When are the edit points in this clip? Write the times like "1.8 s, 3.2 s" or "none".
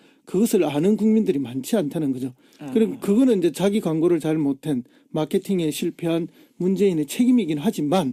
none